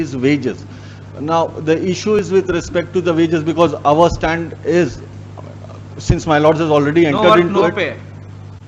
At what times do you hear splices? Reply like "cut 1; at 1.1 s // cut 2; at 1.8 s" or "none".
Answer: none